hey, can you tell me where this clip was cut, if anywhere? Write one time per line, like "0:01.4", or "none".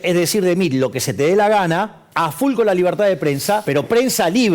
0:02.0
0:03.7